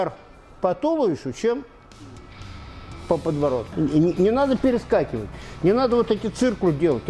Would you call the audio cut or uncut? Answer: cut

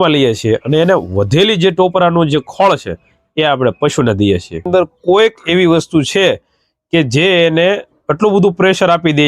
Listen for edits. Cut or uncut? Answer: cut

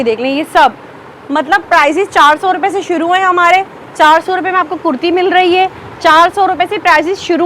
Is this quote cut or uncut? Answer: uncut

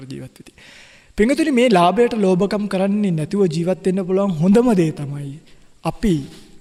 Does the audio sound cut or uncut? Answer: uncut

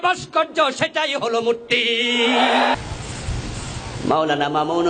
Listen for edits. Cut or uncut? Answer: cut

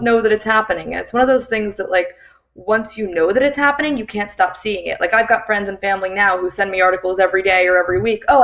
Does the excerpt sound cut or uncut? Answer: uncut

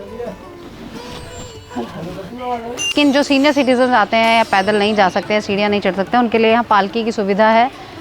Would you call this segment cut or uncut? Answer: cut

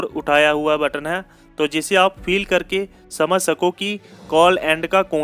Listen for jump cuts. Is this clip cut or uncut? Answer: uncut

